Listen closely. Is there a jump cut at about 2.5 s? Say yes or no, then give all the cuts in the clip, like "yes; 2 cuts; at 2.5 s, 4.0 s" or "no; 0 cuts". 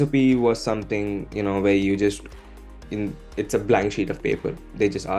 no; 0 cuts